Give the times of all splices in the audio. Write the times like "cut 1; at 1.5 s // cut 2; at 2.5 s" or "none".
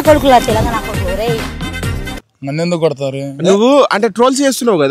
none